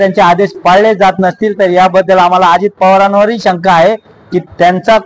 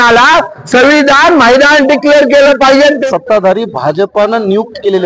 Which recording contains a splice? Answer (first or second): second